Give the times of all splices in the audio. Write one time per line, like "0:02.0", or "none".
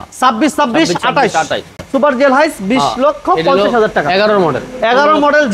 0:01.7